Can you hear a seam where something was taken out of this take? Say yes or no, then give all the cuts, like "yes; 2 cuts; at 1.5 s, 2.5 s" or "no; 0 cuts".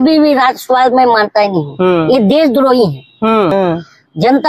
yes; 1 cut; at 3.5 s